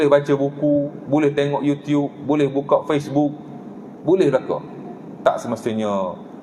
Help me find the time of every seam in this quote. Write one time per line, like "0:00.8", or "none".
0:05.2